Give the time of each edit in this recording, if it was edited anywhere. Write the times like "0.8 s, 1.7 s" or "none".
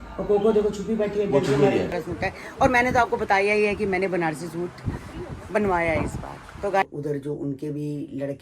2.0 s, 6.8 s